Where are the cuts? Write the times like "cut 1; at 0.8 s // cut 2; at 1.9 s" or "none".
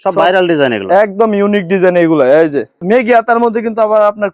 cut 1; at 2.8 s